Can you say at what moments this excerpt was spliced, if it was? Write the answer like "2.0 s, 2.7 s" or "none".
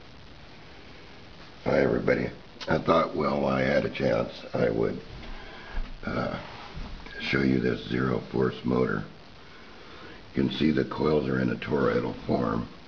7.5 s